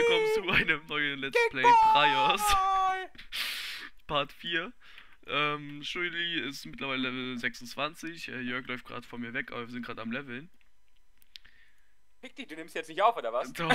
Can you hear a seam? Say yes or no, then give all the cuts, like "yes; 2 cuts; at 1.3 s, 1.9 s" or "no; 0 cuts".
no; 0 cuts